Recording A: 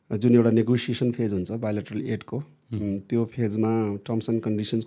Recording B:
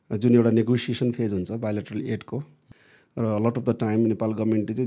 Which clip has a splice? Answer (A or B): B